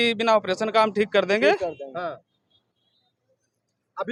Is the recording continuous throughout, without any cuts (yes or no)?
yes